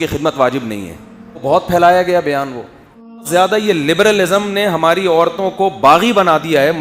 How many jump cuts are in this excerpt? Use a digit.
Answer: 2